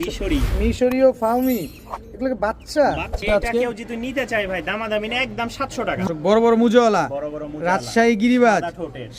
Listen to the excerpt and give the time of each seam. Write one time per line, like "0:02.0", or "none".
0:03.2
0:06.1

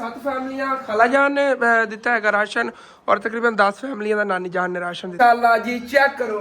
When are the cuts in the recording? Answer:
0:05.1

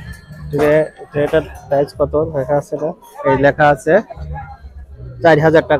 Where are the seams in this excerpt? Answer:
none

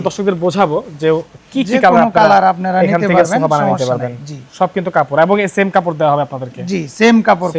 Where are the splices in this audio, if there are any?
none

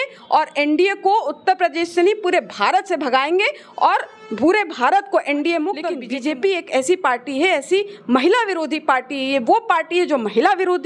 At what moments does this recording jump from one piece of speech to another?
0:06.0

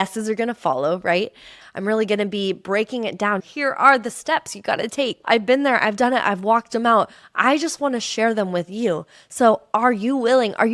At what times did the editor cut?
0:01.6
0:03.4
0:05.2

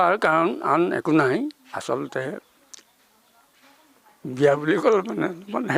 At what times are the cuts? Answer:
none

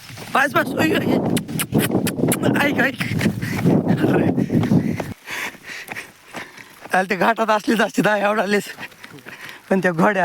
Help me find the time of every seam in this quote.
0:05.1

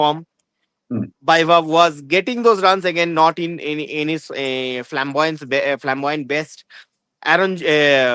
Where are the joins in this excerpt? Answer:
none

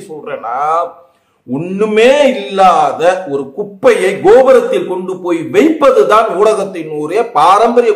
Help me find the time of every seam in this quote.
none

